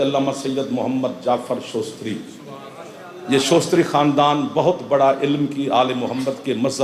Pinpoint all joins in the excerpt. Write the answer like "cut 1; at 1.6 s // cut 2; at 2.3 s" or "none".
none